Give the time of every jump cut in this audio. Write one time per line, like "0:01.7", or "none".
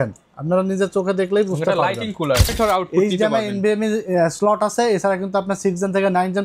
0:02.5